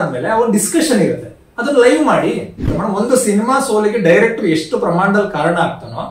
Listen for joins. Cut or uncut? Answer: cut